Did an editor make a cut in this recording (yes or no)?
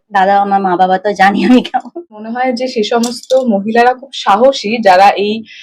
yes